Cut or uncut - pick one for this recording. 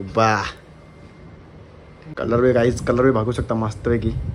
cut